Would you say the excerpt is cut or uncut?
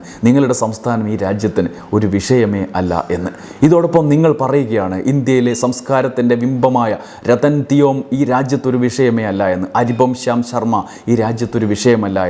uncut